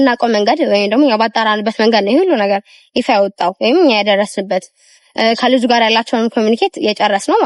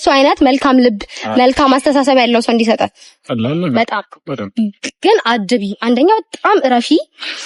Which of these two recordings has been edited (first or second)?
second